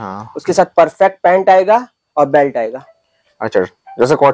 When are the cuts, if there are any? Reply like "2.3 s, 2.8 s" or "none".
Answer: none

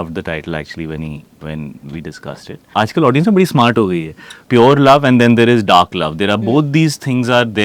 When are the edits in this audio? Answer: 2.7 s, 4.4 s

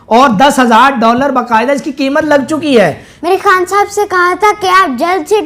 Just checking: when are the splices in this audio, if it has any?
3.1 s

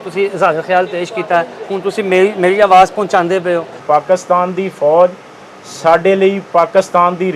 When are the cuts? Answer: 3.8 s

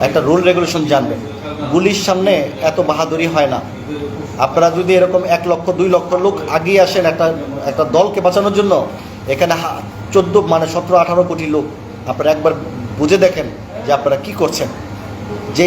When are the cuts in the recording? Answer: none

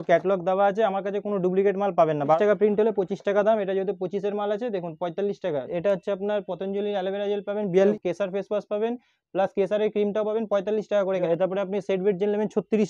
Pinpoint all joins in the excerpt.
2.4 s, 5.7 s, 7.9 s, 11.2 s

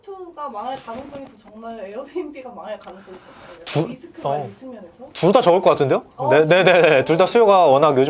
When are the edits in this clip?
none

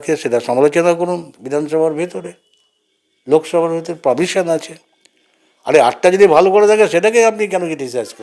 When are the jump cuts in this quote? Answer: none

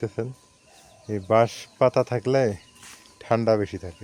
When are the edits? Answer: none

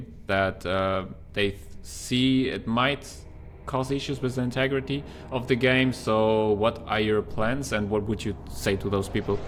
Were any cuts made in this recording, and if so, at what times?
none

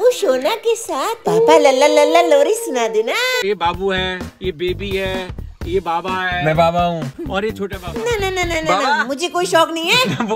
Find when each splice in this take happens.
3.4 s, 7.1 s

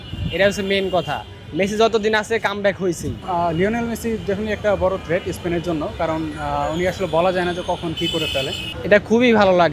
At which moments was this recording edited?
3.1 s, 8.6 s

